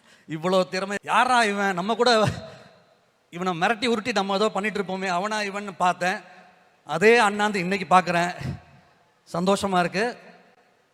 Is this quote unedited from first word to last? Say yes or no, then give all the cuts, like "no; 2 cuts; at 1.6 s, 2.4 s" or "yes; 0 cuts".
no; 1 cut; at 1.0 s